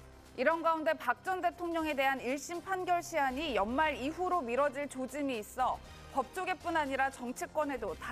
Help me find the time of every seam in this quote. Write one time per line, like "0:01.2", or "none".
0:03.9